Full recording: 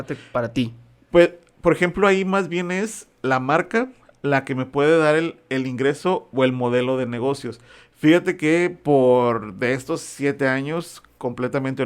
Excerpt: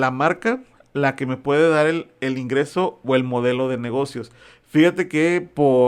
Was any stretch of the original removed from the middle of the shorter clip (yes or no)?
no